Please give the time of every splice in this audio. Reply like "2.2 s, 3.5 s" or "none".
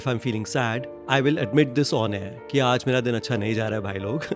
0.9 s

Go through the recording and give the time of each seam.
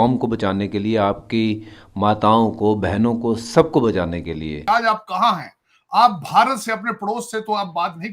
4.6 s

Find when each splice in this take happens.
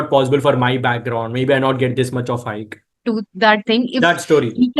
2.9 s

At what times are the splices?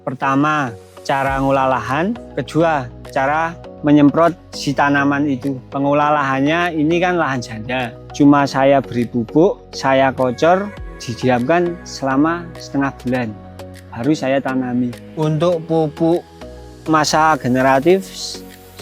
15.0 s

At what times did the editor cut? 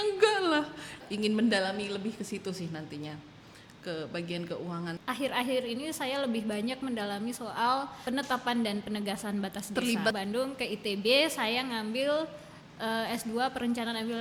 1.0 s, 5.0 s, 10.2 s

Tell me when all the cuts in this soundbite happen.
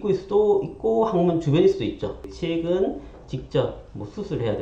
2.3 s

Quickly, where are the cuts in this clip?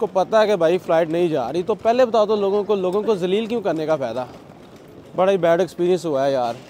none

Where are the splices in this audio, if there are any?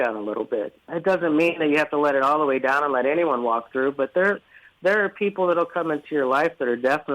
0.9 s

